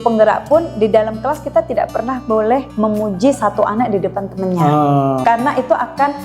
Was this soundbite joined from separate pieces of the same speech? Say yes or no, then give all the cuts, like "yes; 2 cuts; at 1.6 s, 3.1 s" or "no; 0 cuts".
yes; 2 cuts; at 2.7 s, 5.2 s